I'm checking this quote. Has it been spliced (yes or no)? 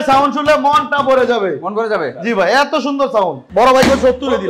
yes